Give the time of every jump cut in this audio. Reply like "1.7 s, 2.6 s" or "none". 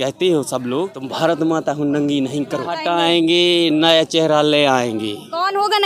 1.0 s, 2.8 s